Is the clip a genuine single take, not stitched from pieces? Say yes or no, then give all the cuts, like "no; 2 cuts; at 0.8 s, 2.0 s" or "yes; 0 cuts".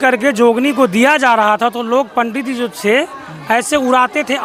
yes; 0 cuts